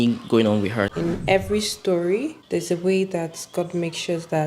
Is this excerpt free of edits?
no; 2 cuts; at 0.9 s, 2.4 s

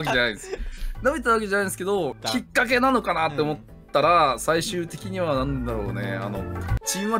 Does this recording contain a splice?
yes; 1 cut; at 2.2 s

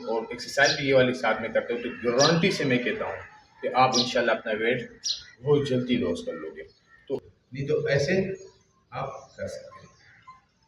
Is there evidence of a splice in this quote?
yes; 1 cut; at 7.2 s

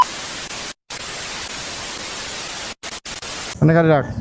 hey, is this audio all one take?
yes; 0 cuts

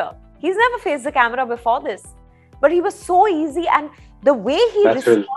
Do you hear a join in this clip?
no; 0 cuts

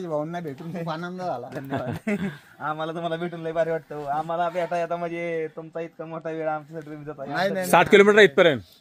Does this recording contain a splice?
no; 0 cuts

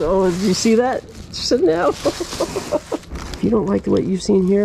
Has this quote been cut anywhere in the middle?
yes; 1 cut; at 3.2 s

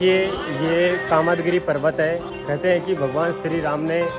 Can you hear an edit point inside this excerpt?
yes; 1 cut; at 2.3 s

